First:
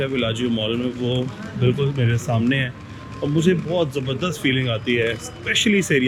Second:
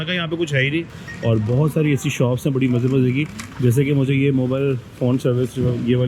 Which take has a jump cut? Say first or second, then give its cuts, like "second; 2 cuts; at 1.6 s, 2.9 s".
second; 1 cut; at 1.0 s